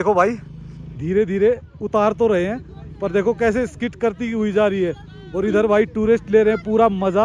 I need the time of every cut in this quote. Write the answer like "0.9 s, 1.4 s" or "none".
none

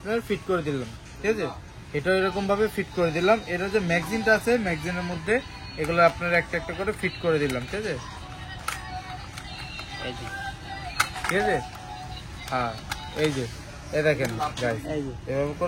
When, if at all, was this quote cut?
none

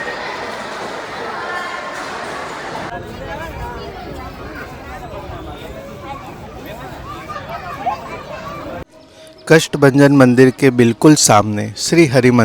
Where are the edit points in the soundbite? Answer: 2.9 s, 8.9 s

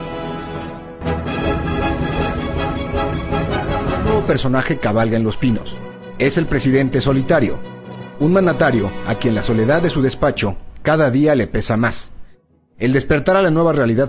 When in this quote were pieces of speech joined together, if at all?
1.0 s

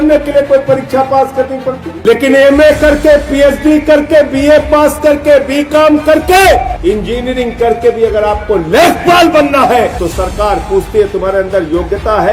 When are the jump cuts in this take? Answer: 1.9 s, 6.7 s, 9.9 s

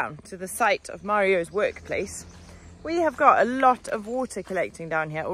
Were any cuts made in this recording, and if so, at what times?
none

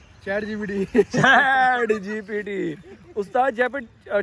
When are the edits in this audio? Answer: none

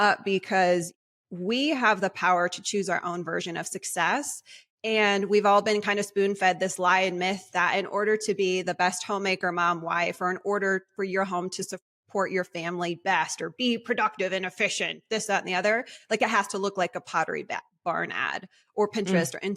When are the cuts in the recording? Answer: none

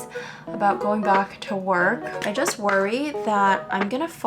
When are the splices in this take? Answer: 2.1 s

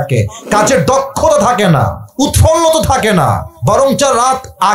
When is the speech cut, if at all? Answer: 2.0 s, 3.5 s

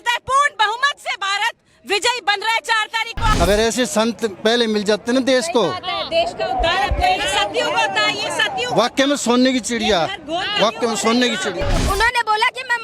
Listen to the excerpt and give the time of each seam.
3.3 s, 11.8 s

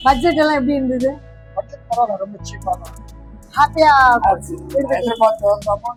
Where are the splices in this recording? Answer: none

